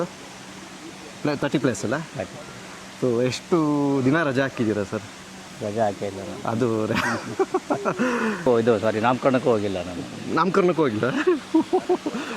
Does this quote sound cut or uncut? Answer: cut